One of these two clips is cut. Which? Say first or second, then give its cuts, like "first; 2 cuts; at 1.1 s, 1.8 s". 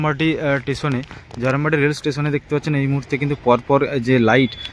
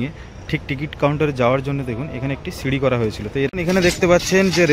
second; 1 cut; at 3.5 s